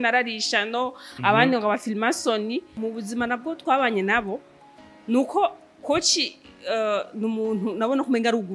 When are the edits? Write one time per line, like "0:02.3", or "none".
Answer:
0:02.8